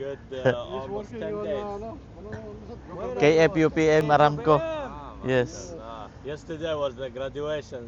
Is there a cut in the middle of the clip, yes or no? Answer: yes